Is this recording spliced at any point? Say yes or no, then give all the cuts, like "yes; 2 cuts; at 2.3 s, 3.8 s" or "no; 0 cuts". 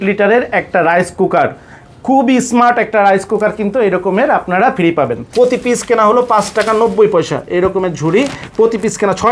yes; 1 cut; at 5.2 s